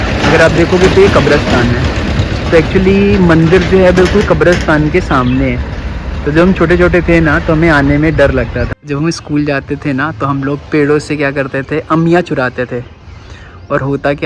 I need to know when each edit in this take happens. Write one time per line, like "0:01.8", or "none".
0:08.8